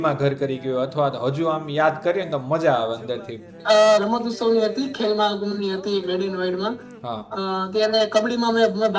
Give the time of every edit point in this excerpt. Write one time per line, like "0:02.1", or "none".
0:03.5